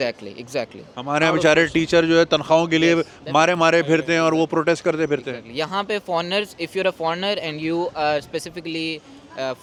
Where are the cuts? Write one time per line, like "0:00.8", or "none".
none